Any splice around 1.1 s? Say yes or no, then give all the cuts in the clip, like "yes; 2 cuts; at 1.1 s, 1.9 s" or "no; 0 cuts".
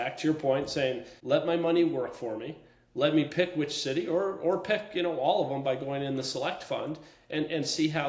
yes; 1 cut; at 1.1 s